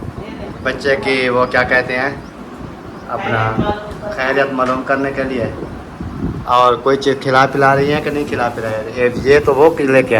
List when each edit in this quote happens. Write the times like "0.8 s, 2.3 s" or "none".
none